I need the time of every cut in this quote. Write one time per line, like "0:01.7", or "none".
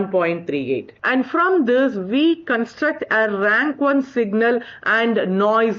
0:00.9